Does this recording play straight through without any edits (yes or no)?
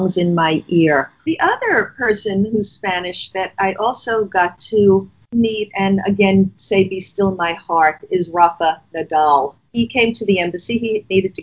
no